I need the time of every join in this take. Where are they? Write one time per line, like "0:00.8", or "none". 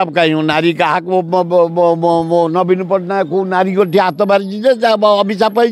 none